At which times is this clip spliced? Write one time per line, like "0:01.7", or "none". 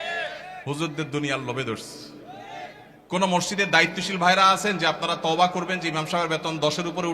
0:02.9

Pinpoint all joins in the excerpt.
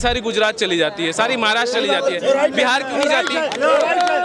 none

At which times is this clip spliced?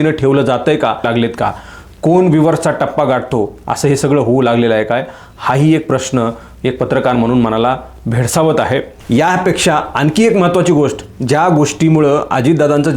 0:01.1
0:08.9

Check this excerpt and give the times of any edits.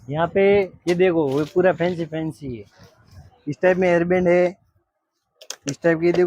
none

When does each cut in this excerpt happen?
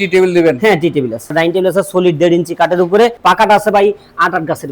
0:01.3
0:03.2

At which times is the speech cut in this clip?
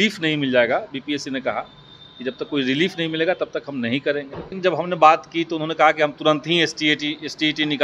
0:04.5

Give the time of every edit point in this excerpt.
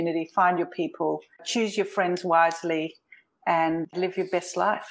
0:01.4
0:03.9

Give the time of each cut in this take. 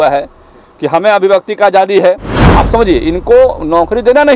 0:02.4

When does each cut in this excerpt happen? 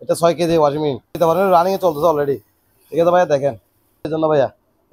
0:01.1
0:04.0

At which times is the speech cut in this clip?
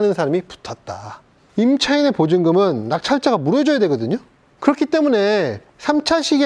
0:01.4

